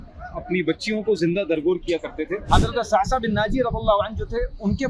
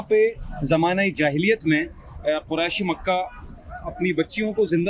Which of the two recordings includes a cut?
first; 1 cut; at 2.4 s

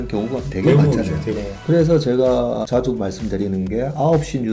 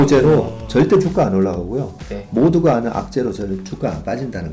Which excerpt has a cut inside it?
first; 2 cuts; at 1.5 s, 2.7 s

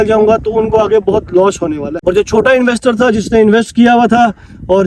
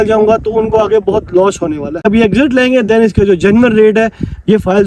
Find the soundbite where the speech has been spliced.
second; 1 cut; at 2.0 s

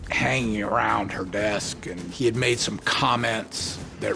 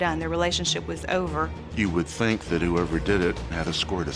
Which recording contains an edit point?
second; 1 cut; at 1.6 s

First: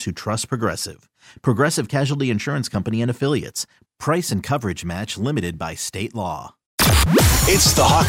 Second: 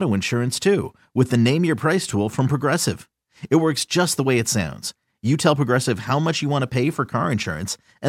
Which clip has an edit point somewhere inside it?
first; 1 cut; at 6.7 s

